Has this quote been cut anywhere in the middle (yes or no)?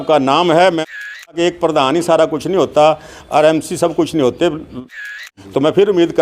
yes